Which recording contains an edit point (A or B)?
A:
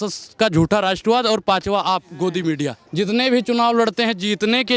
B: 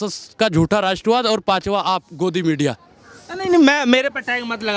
A